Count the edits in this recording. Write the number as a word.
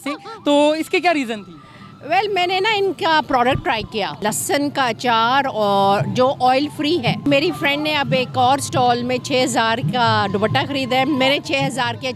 two